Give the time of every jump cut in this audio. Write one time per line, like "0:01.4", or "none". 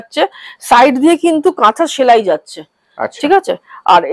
none